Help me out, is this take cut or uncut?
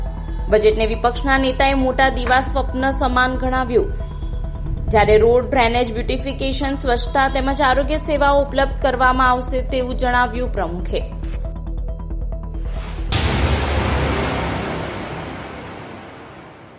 cut